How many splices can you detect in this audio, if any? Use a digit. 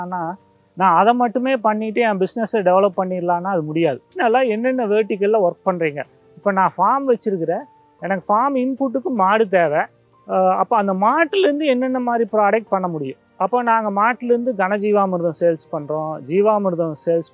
1